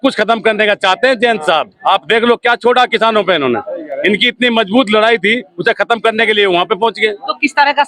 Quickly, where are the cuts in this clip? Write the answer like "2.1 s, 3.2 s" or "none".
none